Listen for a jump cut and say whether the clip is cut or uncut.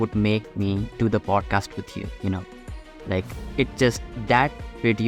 uncut